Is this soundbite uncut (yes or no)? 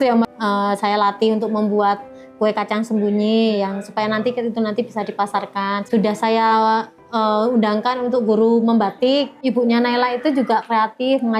yes